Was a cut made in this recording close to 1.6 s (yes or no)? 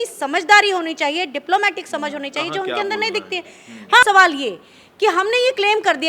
no